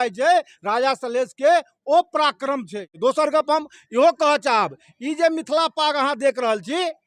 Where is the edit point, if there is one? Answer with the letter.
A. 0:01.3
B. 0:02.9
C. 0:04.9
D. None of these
B